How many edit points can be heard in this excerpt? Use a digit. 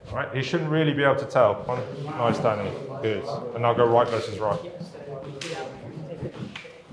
1